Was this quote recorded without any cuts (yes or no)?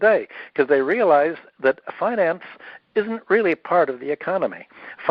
yes